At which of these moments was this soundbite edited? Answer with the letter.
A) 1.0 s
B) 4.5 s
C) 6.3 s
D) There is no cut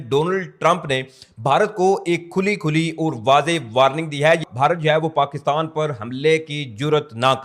B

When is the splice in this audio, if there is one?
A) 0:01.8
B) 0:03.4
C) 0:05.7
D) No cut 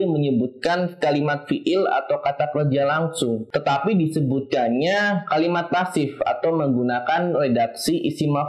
B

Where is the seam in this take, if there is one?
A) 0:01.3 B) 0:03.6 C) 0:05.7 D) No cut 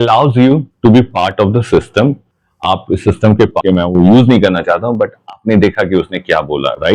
B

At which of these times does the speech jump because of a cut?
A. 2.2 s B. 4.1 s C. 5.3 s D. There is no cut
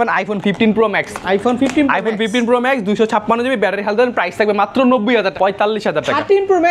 C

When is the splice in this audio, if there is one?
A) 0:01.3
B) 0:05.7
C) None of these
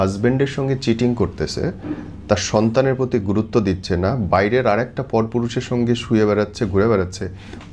C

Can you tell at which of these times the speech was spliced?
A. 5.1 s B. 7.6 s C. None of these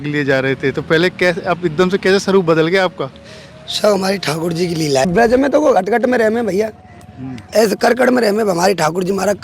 A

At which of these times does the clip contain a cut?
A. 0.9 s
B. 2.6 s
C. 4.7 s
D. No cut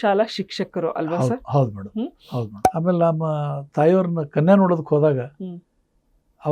B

